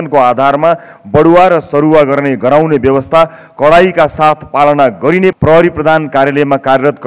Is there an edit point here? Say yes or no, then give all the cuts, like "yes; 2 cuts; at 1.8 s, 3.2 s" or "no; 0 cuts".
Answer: yes; 1 cut; at 5.4 s